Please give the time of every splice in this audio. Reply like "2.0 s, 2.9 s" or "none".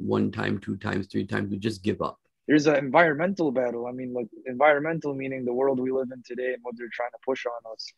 2.3 s